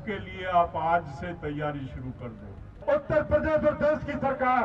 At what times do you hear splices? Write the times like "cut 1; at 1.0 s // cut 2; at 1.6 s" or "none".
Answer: cut 1; at 2.5 s